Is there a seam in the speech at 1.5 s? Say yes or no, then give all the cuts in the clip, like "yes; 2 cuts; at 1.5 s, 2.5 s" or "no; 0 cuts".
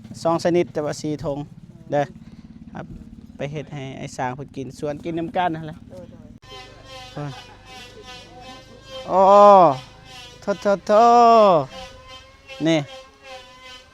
no; 1 cut; at 6.4 s